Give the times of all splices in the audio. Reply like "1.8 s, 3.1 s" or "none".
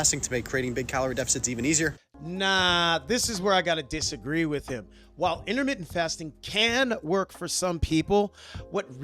none